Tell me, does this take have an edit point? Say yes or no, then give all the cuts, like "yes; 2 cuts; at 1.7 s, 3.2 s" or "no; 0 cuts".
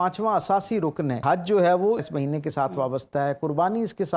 yes; 2 cuts; at 1.2 s, 2.1 s